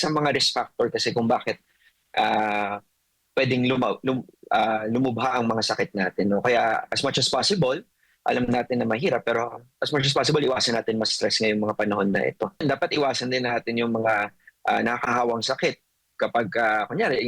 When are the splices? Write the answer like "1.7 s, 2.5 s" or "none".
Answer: 12.6 s